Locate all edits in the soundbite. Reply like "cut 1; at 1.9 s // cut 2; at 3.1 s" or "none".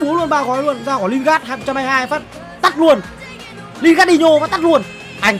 none